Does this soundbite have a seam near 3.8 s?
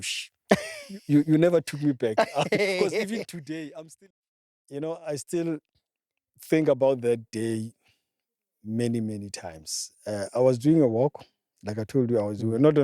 yes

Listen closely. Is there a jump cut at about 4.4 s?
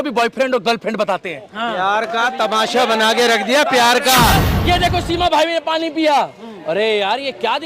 yes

